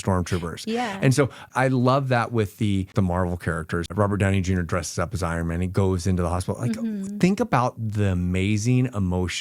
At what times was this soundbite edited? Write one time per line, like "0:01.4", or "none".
0:01.5
0:02.9
0:03.9